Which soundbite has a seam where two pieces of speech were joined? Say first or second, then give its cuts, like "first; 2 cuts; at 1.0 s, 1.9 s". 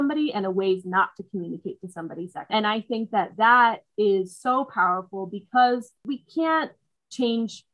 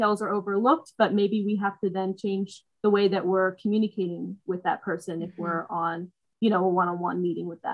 first; 2 cuts; at 2.5 s, 6.0 s